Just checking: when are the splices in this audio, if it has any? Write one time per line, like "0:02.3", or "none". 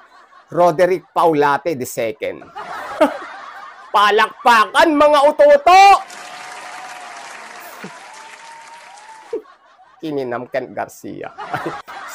0:09.2